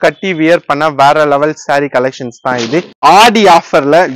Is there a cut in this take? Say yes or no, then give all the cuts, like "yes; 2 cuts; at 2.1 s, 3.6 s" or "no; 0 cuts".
yes; 1 cut; at 2.9 s